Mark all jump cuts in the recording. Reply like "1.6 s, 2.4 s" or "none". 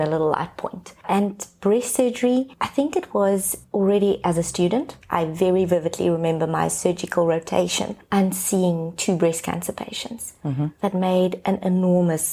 2.6 s, 3.6 s